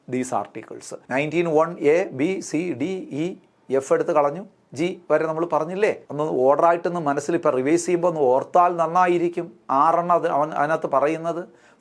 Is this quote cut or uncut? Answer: cut